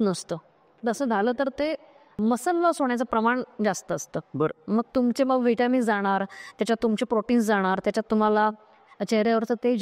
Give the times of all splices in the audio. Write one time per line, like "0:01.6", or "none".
0:02.2

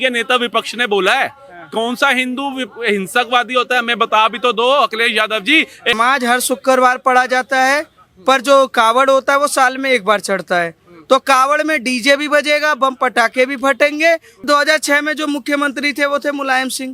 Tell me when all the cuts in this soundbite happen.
0:06.0
0:14.3

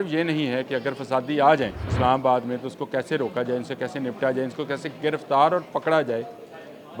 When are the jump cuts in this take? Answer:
0:01.8

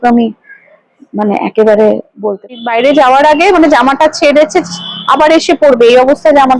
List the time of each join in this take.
0:02.6

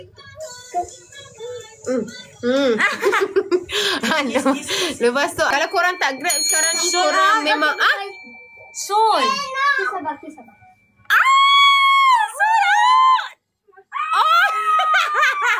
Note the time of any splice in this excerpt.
0:05.5

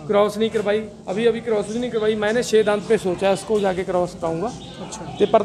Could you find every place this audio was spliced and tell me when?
none

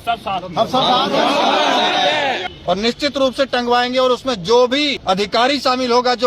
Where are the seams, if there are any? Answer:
0:02.5
0:05.0

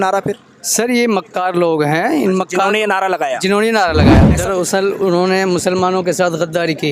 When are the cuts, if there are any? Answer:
0:04.3

